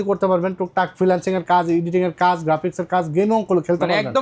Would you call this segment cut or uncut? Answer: uncut